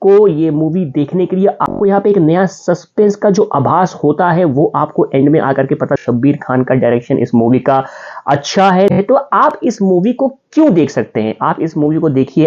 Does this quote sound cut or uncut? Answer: cut